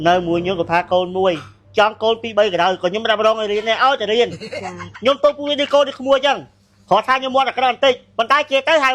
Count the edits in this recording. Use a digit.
1